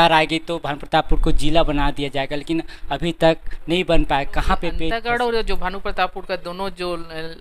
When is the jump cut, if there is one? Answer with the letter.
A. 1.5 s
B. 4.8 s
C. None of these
B